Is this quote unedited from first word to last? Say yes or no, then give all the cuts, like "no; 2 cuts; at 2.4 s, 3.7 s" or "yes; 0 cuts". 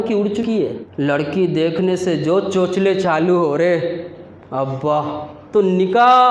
no; 2 cuts; at 0.8 s, 5.4 s